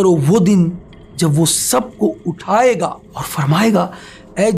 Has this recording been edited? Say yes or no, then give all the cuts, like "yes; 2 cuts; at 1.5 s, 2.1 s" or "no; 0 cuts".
yes; 1 cut; at 2.7 s